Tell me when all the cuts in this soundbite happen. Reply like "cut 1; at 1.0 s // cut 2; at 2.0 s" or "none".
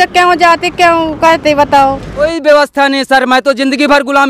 cut 1; at 2.2 s